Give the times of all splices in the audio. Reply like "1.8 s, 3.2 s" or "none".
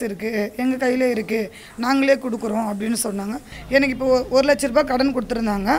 3.5 s